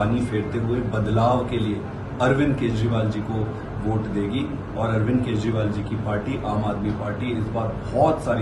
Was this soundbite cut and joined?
no; 0 cuts

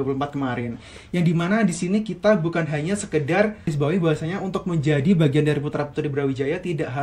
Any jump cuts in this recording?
yes; 1 cut; at 3.7 s

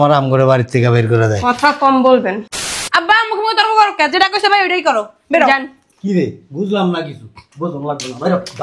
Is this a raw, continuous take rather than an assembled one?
no; 1 cut; at 2.5 s

